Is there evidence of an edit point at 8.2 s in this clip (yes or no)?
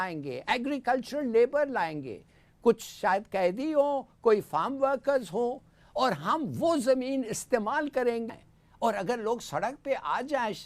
yes